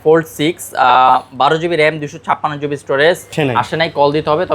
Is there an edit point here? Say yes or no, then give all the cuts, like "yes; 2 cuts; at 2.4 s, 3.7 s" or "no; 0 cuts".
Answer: yes; 1 cut; at 3.3 s